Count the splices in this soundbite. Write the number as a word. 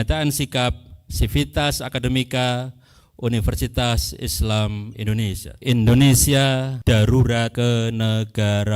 three